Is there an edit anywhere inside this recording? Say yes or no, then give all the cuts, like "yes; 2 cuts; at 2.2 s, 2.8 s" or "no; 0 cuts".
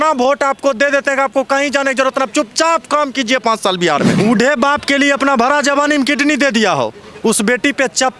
yes; 1 cut; at 4.1 s